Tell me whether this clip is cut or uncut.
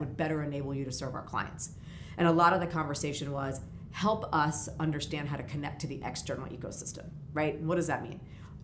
uncut